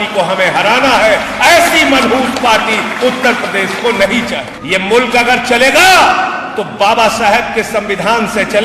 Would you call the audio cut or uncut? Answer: cut